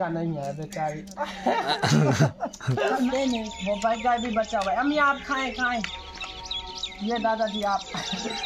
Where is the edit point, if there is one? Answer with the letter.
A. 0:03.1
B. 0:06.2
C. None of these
A